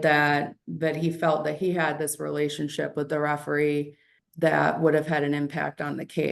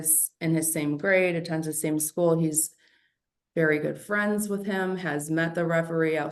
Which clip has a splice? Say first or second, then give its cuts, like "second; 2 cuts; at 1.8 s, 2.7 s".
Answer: first; 1 cut; at 4.2 s